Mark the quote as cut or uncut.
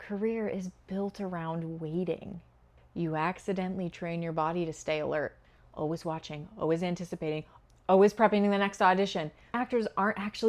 cut